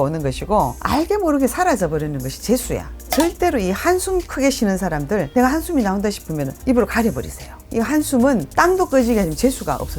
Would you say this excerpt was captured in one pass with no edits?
no; 1 cut; at 3.0 s

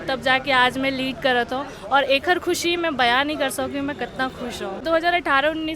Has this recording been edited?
yes; 1 cut; at 4.8 s

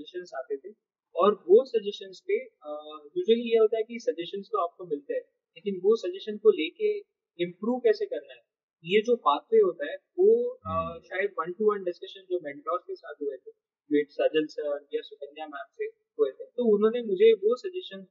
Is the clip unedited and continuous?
yes; 0 cuts

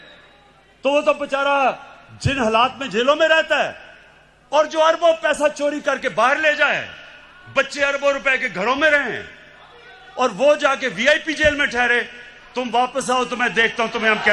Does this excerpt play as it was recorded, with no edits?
yes; 0 cuts

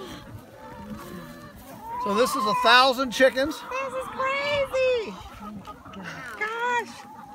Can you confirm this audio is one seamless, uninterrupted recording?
yes; 0 cuts

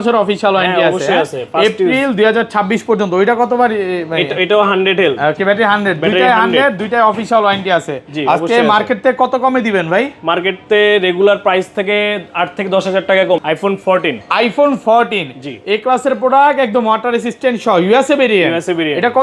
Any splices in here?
yes; 1 cut; at 13.4 s

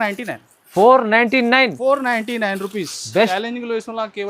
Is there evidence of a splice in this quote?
yes; 1 cut; at 3.3 s

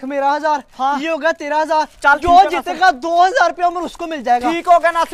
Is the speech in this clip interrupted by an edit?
no; 0 cuts

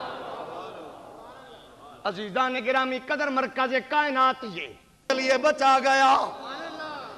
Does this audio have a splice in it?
yes; 1 cut; at 5.0 s

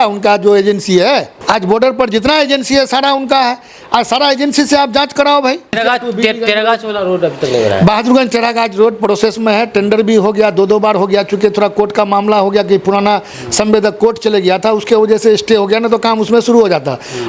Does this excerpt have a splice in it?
yes; 2 cuts; at 1.3 s, 5.8 s

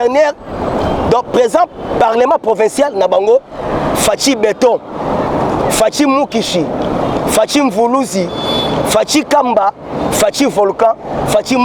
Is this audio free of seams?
yes; 0 cuts

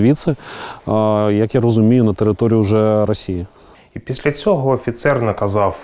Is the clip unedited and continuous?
no; 1 cut; at 3.3 s

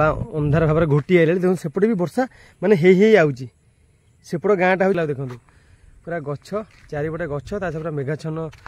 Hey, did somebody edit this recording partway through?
yes; 1 cut; at 5.0 s

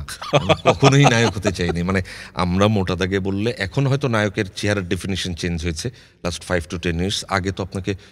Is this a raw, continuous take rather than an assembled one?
yes; 0 cuts

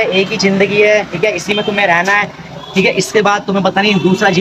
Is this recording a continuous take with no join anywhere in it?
yes; 0 cuts

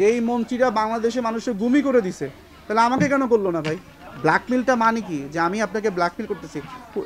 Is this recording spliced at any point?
no; 0 cuts

